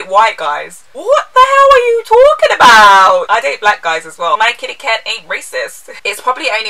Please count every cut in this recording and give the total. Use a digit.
3